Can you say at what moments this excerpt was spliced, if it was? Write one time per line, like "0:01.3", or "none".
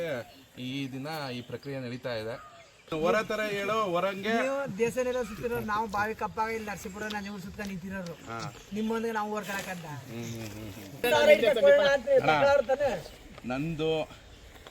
0:02.9
0:11.0